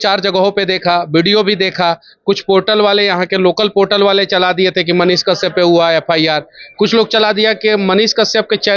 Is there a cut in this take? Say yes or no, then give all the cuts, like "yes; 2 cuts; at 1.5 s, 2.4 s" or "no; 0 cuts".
no; 0 cuts